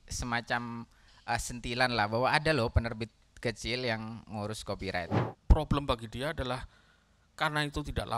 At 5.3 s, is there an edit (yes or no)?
yes